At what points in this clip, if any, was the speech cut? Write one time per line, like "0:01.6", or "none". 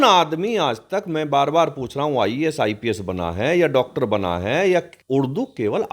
0:05.0